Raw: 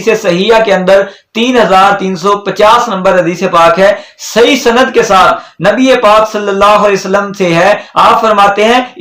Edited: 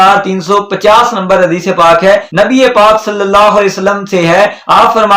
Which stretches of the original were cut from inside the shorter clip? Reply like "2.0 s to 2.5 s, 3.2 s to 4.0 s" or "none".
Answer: 4.0 s to 5.5 s